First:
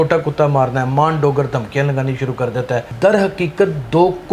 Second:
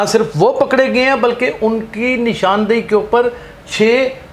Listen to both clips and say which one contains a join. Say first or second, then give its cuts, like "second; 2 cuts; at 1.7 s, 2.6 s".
first; 1 cut; at 2.9 s